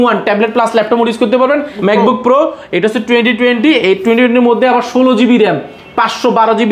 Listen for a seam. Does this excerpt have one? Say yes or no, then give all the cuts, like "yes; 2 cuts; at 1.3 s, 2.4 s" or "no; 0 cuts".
yes; 1 cut; at 1.8 s